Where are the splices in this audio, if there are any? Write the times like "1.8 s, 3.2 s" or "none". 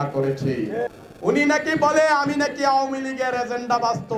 1.0 s